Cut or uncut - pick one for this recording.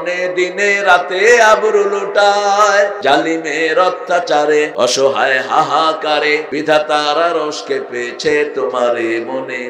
cut